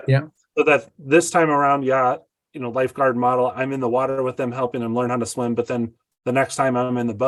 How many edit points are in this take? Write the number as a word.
zero